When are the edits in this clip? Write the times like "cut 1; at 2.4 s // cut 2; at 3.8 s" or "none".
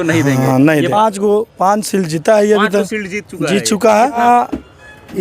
cut 1; at 0.9 s // cut 2; at 4.2 s